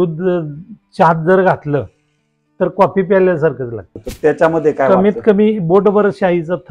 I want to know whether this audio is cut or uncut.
cut